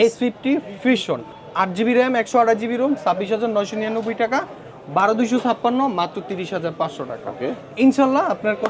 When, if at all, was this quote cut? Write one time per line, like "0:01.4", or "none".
none